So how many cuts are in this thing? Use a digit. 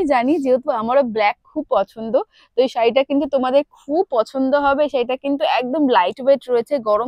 0